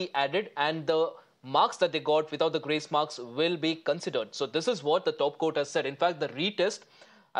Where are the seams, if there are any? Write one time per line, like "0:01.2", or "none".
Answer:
0:04.0